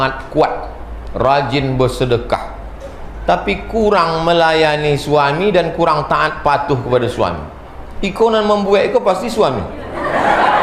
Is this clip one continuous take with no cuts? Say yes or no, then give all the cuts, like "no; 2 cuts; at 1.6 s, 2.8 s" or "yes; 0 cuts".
yes; 0 cuts